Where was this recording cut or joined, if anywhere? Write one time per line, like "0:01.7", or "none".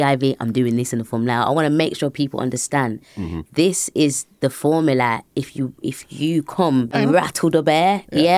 0:06.9